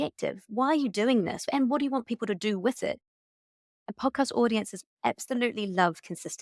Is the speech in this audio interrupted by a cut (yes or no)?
yes